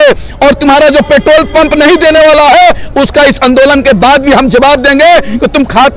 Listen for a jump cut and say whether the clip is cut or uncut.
uncut